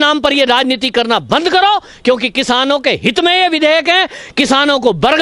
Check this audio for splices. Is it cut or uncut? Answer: uncut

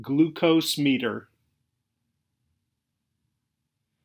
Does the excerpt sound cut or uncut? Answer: uncut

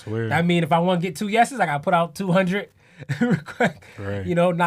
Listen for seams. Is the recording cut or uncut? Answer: uncut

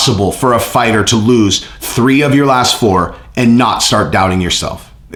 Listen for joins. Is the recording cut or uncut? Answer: uncut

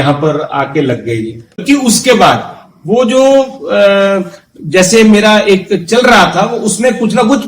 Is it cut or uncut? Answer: cut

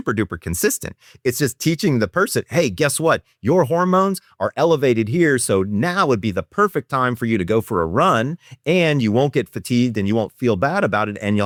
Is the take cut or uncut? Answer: uncut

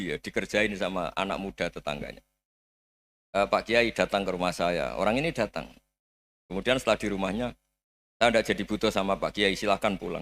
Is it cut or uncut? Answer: uncut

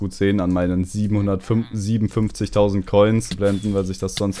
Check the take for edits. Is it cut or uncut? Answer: cut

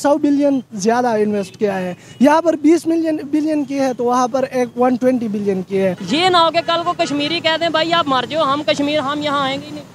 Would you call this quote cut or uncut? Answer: cut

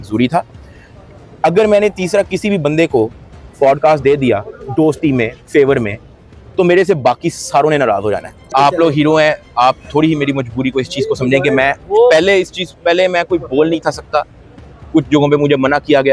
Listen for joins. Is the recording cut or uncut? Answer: cut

